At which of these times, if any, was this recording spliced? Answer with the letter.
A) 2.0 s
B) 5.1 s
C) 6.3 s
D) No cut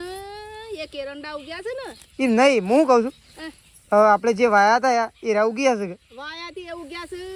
D